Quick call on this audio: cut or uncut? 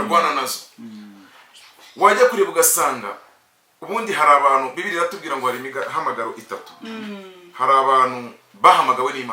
uncut